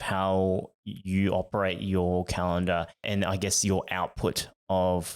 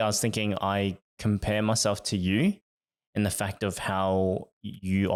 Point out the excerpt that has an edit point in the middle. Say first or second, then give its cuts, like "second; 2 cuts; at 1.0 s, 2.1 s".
first; 1 cut; at 3.0 s